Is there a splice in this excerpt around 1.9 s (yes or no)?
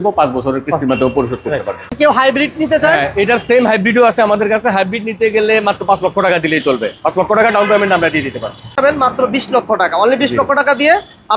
yes